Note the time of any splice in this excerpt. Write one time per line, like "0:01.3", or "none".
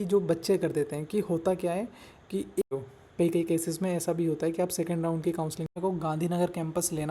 0:02.6
0:05.7